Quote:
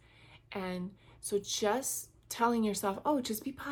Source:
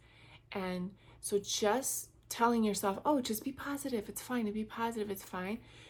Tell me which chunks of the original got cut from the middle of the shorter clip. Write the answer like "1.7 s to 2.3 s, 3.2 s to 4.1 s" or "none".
none